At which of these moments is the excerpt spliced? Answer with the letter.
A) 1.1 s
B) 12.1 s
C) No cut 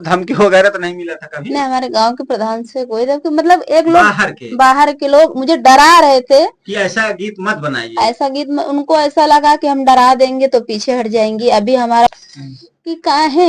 B